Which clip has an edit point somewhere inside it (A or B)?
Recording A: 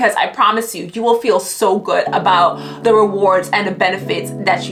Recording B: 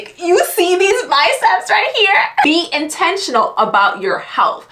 B